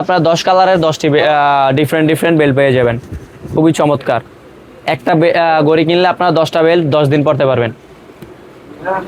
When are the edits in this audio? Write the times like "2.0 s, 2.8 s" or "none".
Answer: none